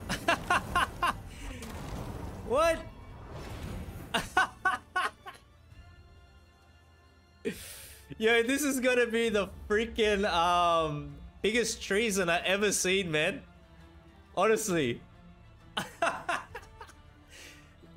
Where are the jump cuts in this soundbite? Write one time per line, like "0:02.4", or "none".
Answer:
none